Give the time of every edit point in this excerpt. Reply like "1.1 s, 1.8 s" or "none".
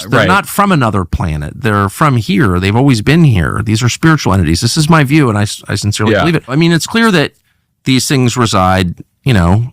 6.5 s

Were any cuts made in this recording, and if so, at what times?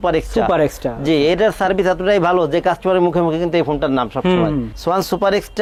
none

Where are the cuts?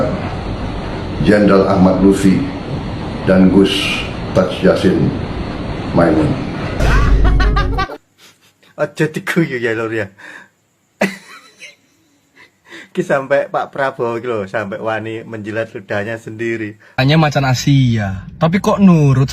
16.8 s

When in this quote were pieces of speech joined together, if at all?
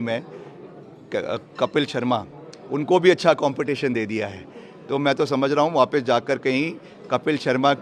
none

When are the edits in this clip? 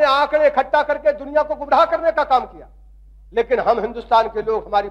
none

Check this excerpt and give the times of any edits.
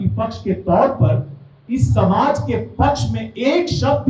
none

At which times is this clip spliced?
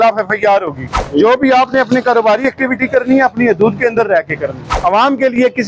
1.0 s, 4.7 s

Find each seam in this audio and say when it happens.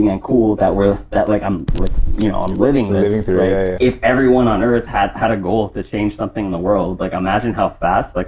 3.7 s

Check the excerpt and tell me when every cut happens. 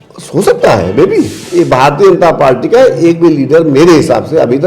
1.4 s

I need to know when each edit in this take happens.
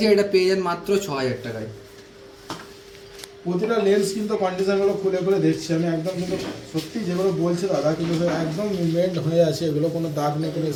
none

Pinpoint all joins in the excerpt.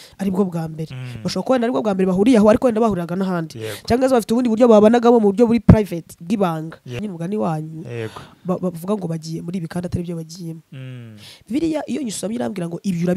6.9 s

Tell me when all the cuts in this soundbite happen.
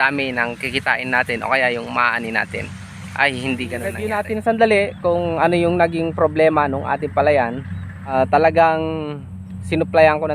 4.0 s, 7.7 s

